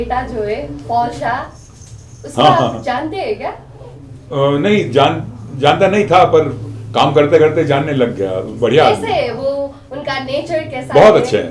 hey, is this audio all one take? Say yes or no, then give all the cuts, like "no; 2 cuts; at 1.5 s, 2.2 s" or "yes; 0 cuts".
yes; 0 cuts